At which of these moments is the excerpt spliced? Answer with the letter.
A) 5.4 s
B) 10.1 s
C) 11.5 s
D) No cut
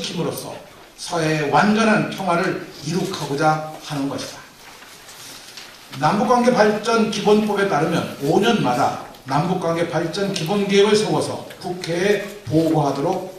C